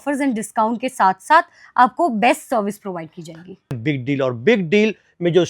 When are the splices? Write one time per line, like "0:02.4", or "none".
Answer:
0:03.8